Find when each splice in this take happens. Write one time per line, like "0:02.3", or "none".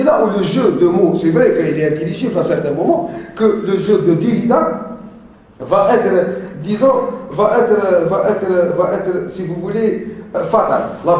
0:09.6